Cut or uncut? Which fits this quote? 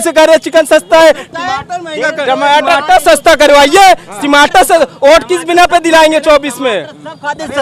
uncut